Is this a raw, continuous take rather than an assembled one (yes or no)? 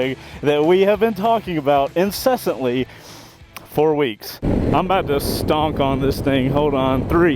no